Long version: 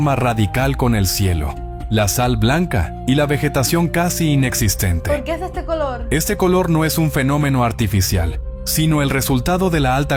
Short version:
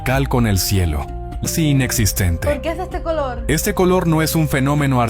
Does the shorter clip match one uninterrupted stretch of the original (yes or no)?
no